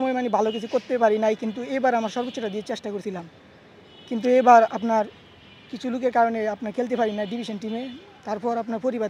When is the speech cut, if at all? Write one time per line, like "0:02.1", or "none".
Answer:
none